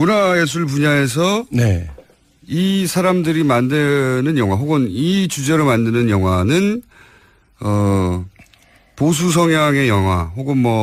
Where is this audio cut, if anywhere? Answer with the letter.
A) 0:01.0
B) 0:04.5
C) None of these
A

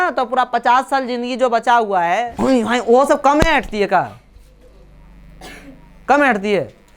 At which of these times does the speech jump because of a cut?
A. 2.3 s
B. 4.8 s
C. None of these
A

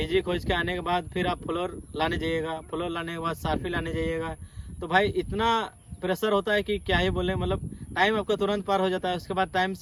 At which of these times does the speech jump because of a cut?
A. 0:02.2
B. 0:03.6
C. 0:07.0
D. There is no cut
D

